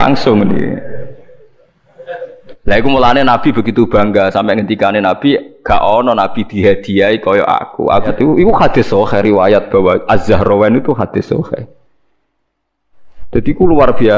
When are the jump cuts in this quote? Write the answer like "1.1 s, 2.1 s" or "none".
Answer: 8.1 s